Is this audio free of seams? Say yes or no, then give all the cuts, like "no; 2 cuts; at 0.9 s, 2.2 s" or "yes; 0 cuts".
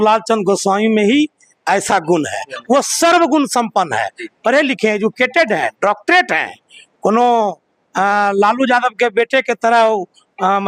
yes; 0 cuts